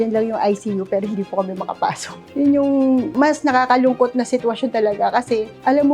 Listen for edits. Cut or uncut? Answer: cut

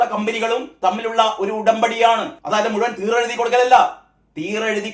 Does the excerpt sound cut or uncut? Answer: cut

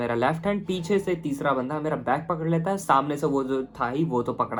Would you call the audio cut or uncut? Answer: uncut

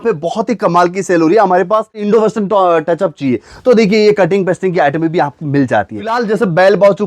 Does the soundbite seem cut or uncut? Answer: cut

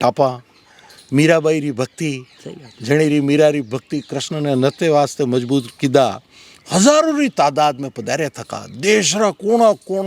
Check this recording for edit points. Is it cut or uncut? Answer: uncut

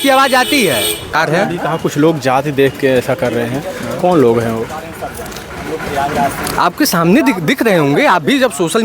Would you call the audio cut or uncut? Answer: cut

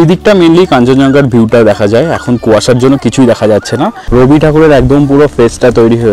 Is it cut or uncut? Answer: cut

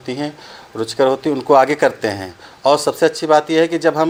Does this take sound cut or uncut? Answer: uncut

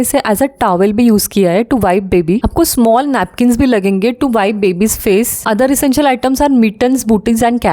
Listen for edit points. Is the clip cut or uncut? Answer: uncut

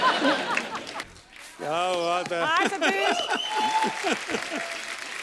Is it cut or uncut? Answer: cut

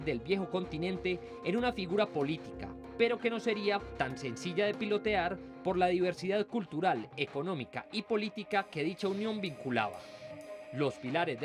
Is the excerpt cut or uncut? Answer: uncut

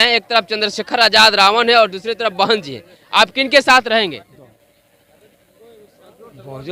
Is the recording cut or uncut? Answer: cut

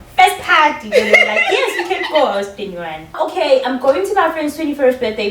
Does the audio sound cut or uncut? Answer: cut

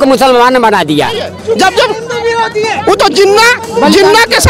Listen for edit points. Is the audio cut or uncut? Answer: cut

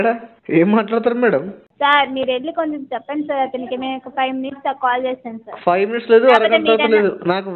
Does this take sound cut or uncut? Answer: cut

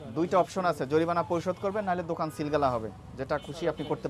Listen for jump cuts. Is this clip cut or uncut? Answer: uncut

